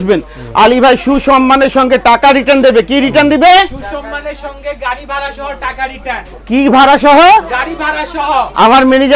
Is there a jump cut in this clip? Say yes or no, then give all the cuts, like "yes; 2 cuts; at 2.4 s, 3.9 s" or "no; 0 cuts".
no; 0 cuts